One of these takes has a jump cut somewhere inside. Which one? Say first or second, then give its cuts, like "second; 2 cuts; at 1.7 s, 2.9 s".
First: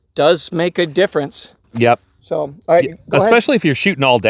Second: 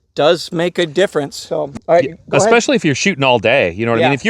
second; 1 cut; at 1.4 s